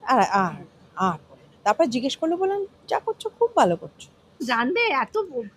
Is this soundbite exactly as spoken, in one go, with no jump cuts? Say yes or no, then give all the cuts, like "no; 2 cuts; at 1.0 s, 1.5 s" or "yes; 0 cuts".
no; 1 cut; at 4.4 s